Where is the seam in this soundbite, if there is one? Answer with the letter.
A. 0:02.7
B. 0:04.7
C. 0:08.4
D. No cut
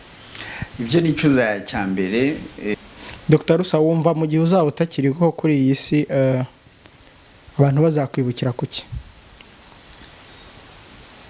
A